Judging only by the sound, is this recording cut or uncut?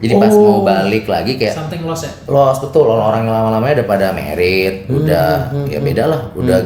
uncut